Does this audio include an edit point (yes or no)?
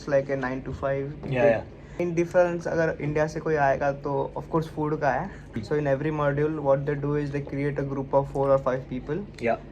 yes